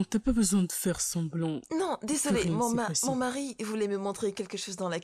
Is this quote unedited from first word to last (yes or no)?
no